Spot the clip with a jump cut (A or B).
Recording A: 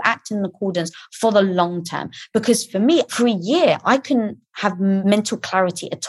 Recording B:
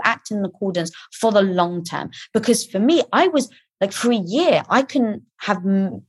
A